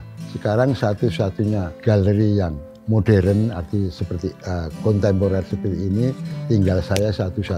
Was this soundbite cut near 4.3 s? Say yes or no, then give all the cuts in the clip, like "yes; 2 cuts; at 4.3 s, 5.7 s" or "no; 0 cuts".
no; 2 cuts; at 1.7 s, 2.7 s